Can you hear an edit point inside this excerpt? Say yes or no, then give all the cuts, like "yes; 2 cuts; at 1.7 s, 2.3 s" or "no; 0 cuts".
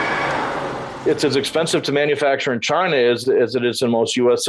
yes; 1 cut; at 1.0 s